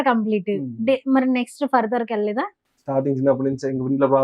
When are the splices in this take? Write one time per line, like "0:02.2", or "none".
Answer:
0:02.7